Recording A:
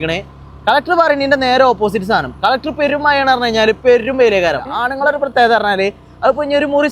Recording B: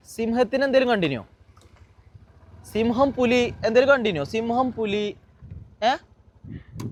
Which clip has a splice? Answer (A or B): A